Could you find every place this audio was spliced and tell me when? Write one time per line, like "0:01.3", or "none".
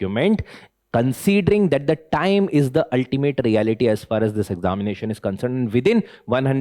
none